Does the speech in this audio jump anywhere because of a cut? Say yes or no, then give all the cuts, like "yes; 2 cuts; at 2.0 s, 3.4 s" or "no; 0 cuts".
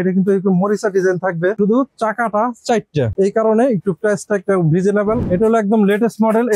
yes; 2 cuts; at 1.6 s, 5.3 s